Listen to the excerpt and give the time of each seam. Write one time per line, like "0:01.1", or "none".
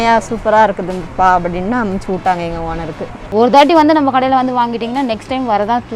0:03.1